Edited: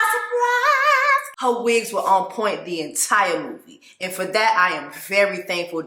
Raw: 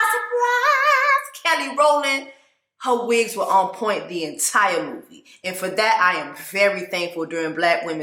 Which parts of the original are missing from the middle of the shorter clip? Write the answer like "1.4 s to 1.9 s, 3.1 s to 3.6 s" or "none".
1.3 s to 2.7 s